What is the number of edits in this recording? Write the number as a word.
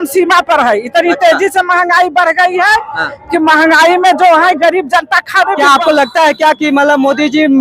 one